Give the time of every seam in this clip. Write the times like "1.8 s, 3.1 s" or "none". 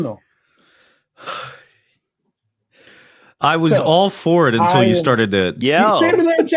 5.6 s